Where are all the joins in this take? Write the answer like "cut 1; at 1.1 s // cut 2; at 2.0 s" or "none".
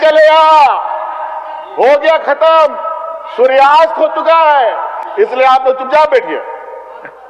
none